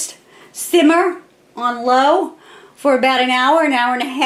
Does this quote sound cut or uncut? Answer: uncut